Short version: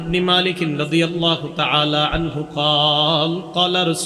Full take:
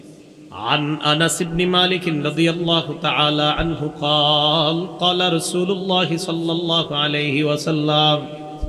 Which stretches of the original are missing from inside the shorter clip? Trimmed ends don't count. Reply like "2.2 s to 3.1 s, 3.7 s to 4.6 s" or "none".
none